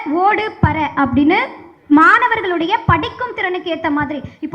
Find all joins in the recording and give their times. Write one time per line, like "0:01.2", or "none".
none